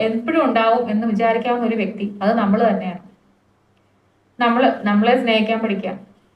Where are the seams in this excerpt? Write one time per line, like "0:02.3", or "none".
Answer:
none